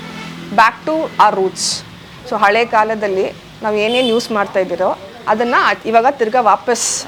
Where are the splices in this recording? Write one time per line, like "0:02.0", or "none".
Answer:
none